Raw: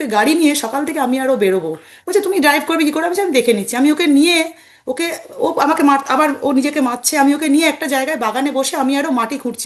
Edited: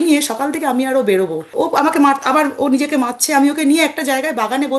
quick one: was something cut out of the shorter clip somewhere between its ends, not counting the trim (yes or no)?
yes